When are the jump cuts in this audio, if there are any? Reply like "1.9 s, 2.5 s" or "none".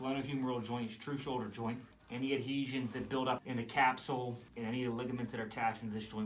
1.9 s, 3.4 s, 4.4 s